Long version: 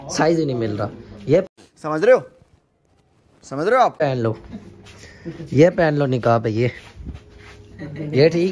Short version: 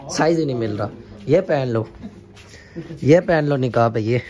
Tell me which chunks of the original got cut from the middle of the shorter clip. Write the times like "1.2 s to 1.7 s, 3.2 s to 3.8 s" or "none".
1.5 s to 4.0 s